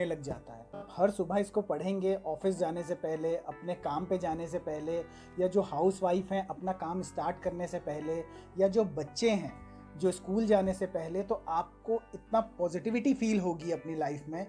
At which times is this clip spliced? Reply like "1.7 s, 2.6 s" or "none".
0.9 s